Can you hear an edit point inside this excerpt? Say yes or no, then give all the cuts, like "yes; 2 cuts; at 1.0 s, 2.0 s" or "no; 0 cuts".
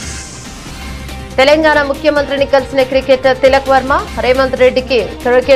yes; 1 cut; at 1.3 s